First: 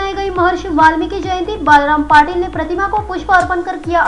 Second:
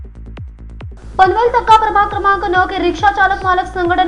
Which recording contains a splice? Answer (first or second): second